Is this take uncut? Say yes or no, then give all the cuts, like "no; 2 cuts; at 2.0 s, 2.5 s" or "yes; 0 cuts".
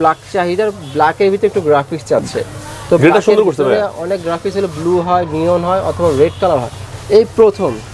yes; 0 cuts